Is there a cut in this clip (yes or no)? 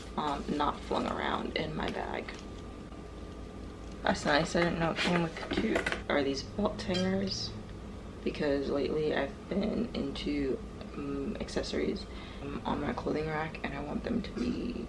no